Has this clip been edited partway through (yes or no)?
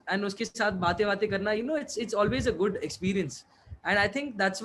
no